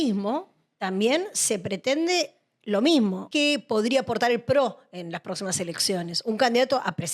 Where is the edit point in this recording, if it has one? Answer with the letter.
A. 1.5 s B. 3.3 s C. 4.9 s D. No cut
B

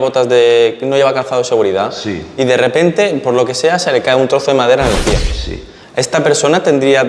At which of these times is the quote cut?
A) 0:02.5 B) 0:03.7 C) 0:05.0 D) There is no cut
D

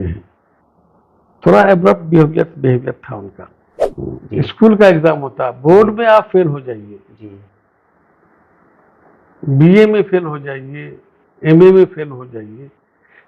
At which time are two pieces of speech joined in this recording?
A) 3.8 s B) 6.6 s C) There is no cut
A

